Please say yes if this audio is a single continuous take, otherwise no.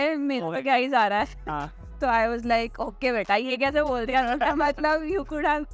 yes